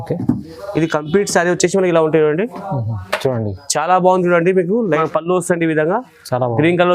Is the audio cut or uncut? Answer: cut